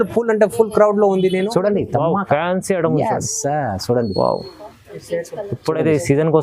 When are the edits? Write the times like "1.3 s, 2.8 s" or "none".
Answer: 1.5 s